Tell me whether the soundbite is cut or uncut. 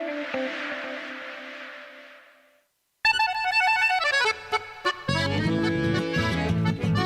cut